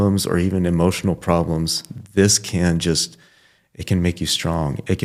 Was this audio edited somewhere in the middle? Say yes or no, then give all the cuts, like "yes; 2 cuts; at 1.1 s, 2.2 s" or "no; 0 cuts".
no; 0 cuts